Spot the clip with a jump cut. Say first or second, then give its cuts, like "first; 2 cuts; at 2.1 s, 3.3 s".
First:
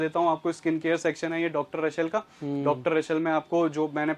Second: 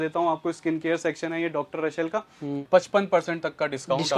second; 1 cut; at 2.6 s